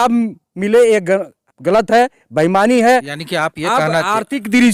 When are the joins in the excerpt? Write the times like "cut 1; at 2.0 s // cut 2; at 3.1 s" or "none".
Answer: none